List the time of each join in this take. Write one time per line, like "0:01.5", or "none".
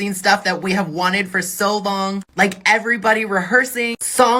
none